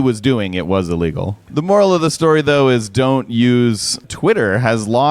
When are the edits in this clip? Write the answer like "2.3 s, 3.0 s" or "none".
1.5 s, 4.0 s